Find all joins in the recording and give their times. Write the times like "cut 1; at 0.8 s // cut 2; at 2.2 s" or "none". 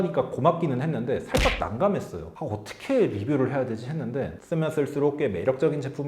cut 1; at 4.4 s